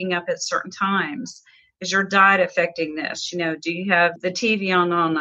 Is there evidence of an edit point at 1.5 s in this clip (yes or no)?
no